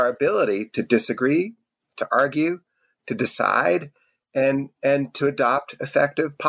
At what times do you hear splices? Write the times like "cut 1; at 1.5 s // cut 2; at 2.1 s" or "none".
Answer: none